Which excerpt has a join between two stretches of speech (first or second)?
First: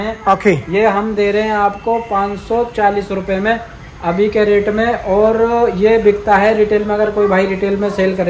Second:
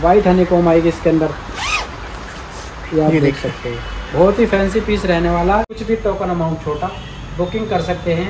second